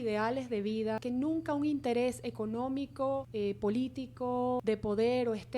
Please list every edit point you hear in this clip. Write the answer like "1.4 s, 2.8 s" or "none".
1.0 s, 3.3 s, 4.6 s